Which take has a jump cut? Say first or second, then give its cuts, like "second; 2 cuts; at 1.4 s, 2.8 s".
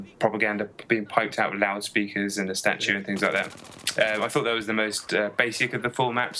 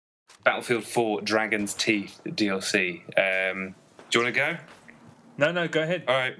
first; 1 cut; at 3.4 s